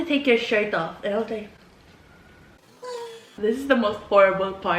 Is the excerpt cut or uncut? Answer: cut